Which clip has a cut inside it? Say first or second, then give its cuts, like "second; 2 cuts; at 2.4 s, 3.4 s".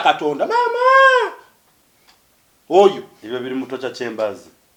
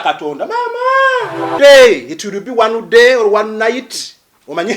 second; 1 cut; at 1.5 s